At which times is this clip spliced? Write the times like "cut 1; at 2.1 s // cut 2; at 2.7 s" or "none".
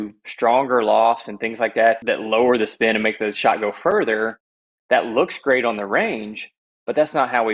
cut 1; at 2.0 s